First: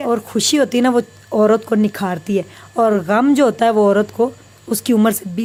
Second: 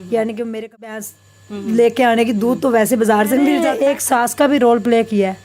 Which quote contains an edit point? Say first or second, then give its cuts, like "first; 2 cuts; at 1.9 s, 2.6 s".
second; 2 cuts; at 1.0 s, 3.7 s